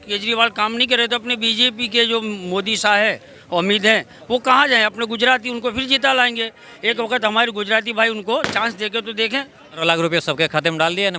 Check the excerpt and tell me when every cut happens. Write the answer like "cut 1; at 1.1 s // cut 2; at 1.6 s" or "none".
cut 1; at 9.8 s